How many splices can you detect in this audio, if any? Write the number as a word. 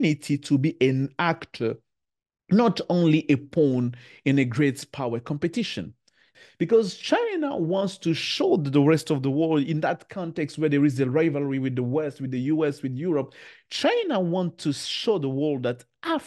one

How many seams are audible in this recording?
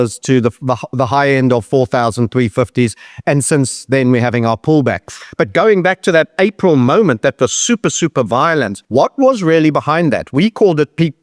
one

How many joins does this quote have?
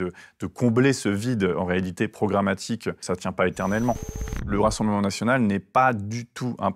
two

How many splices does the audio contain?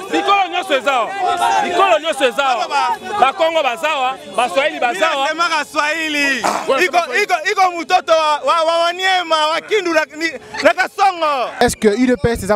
one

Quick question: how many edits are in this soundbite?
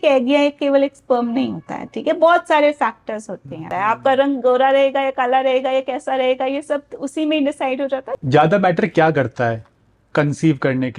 two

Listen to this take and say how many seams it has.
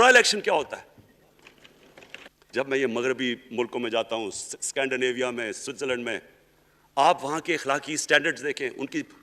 one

